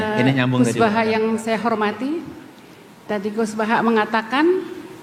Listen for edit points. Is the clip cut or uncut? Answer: uncut